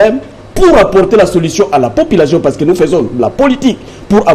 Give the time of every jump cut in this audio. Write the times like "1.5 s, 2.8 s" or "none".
none